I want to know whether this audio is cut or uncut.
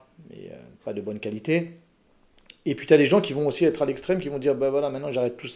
uncut